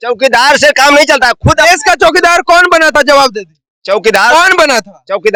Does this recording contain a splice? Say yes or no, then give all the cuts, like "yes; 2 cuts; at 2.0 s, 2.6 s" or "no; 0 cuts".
no; 0 cuts